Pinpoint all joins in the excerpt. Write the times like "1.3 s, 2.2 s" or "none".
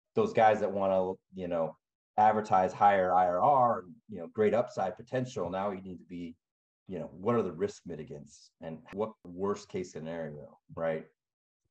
8.9 s